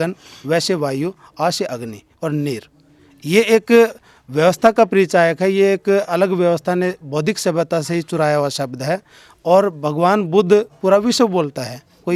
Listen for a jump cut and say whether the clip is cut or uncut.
uncut